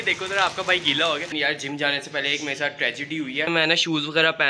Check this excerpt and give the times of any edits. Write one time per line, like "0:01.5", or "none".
0:01.3
0:03.5